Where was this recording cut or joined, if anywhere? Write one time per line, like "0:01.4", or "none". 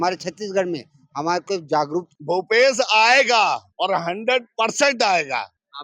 0:02.1